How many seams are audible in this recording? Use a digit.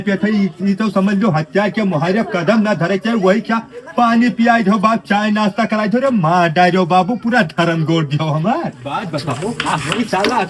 1